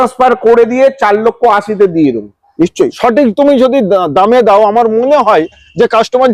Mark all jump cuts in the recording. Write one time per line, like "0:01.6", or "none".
0:02.4